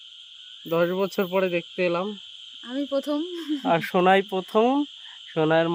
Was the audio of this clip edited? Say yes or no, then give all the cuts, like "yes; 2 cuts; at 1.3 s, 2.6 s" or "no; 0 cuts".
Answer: no; 0 cuts